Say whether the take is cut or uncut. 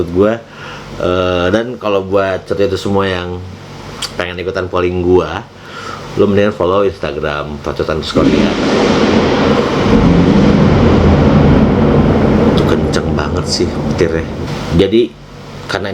cut